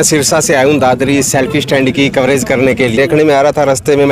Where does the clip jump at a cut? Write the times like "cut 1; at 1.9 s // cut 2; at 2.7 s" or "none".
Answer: cut 1; at 3.0 s